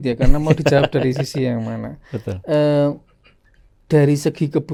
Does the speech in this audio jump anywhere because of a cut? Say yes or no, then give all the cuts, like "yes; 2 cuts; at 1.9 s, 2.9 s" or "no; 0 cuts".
no; 0 cuts